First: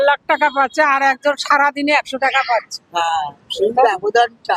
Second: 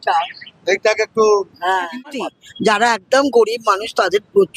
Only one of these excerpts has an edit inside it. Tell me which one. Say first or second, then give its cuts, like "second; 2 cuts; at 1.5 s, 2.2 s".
second; 1 cut; at 2.0 s